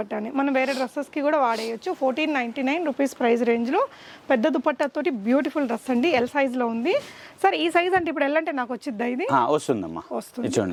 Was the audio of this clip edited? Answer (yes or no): no